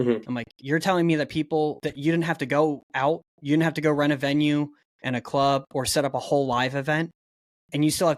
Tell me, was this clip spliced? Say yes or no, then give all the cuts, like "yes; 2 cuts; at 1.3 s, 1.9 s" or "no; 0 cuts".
yes; 1 cut; at 1.9 s